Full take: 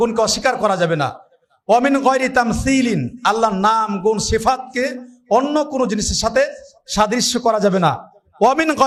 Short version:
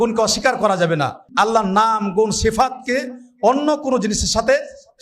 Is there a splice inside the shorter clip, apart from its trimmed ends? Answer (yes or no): yes